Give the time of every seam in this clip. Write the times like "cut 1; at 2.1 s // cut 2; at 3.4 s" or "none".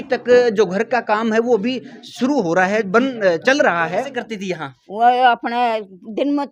cut 1; at 4.2 s